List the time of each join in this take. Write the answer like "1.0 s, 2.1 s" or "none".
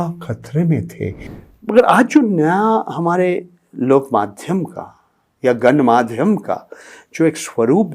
1.3 s